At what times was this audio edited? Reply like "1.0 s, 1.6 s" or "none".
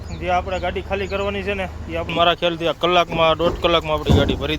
2.1 s